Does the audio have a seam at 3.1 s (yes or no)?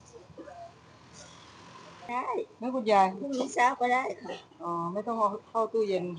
no